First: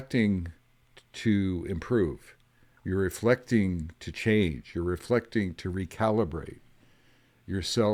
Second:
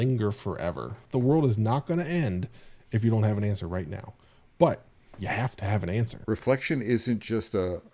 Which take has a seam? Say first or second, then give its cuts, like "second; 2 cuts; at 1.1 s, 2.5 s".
second; 2 cuts; at 1.0 s, 6.2 s